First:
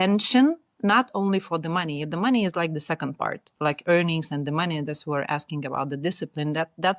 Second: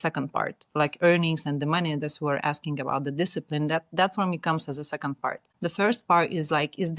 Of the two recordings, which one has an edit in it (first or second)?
second